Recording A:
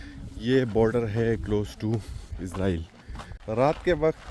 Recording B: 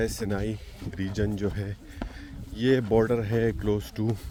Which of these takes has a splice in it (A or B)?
A